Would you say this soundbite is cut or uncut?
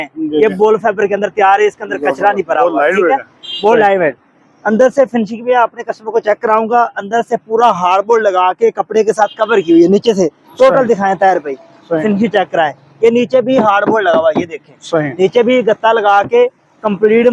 uncut